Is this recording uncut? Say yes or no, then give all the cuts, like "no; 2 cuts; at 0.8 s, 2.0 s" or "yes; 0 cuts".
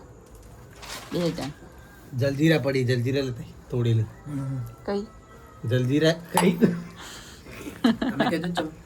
yes; 0 cuts